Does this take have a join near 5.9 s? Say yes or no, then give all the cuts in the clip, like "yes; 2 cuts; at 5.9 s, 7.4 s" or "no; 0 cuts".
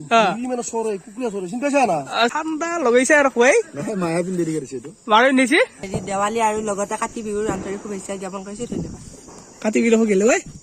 yes; 2 cuts; at 2.3 s, 5.9 s